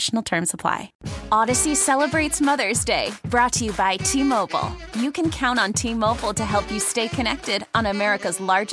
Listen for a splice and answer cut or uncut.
cut